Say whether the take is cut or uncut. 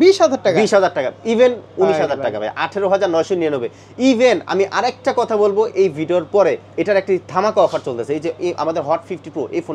uncut